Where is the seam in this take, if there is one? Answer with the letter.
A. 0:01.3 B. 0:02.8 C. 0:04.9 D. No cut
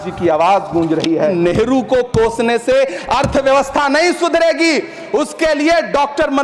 A